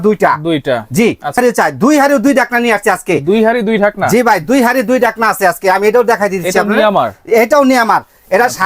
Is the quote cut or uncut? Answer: cut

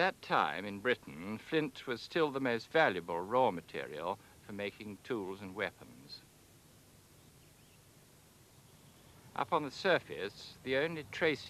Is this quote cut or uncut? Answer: uncut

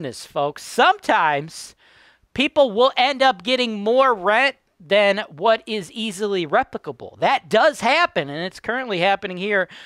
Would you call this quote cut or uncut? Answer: uncut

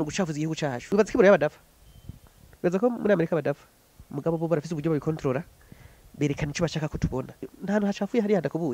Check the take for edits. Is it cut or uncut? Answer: cut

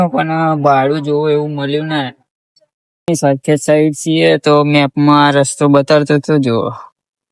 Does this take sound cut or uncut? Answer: cut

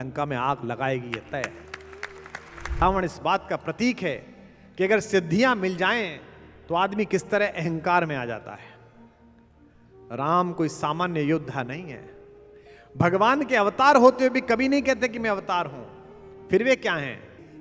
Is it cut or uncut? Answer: cut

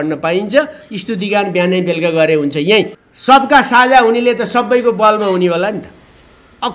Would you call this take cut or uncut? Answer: cut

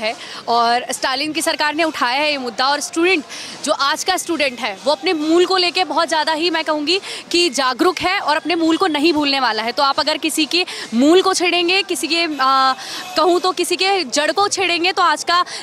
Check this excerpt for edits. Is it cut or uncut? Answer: uncut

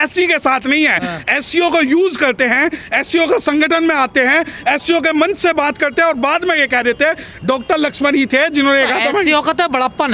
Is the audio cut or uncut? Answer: uncut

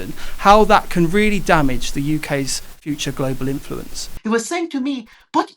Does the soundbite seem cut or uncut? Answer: cut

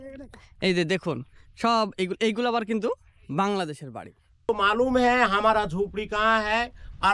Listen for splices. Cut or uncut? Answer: cut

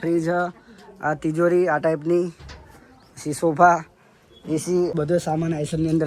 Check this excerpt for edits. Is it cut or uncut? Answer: cut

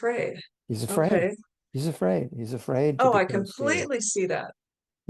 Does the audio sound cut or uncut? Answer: uncut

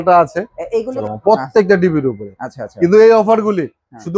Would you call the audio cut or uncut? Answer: cut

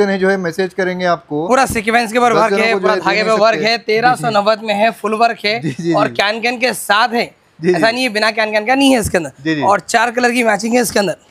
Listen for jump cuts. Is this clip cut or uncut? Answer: uncut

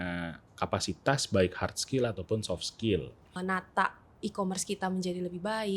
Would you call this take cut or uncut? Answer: cut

